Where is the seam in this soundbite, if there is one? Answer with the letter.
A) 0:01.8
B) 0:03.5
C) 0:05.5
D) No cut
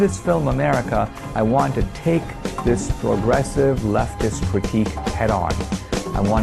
D